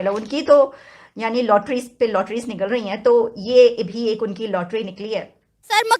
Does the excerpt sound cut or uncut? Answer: uncut